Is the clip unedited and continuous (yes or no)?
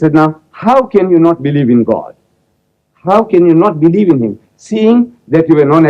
yes